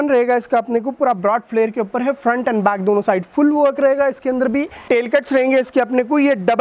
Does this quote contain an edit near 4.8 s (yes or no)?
yes